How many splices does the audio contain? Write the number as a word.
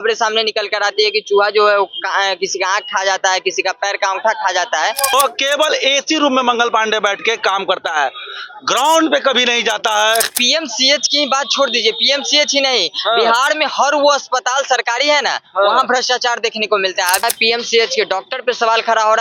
three